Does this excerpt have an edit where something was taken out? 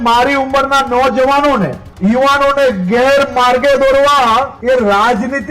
yes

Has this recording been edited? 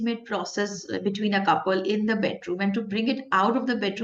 no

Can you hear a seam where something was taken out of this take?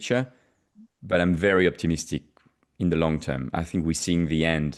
no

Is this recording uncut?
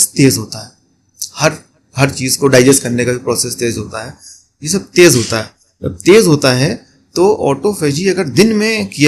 yes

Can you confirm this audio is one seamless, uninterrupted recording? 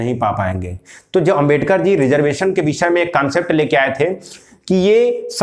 yes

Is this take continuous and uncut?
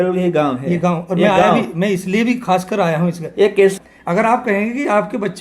no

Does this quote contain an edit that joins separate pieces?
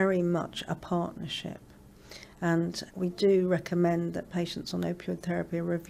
no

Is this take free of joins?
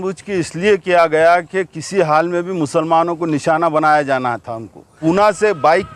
no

